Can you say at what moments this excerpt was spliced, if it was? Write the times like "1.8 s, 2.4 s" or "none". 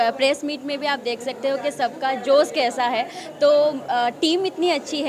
none